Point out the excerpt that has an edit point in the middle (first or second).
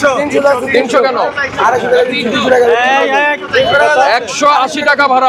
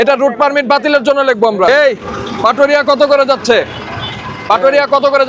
second